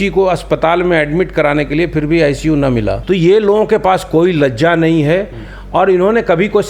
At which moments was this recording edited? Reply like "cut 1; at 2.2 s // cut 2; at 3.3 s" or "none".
cut 1; at 3.0 s